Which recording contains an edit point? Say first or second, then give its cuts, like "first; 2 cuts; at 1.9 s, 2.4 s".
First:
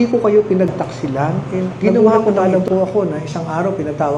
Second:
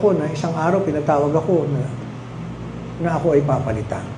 first; 1 cut; at 2.0 s